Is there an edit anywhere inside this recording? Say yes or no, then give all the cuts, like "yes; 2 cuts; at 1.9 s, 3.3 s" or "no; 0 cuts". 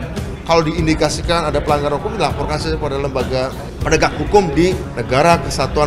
yes; 2 cuts; at 3.7 s, 4.9 s